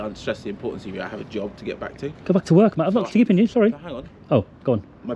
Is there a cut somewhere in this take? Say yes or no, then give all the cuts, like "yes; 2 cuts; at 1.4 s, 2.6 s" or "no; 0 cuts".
no; 0 cuts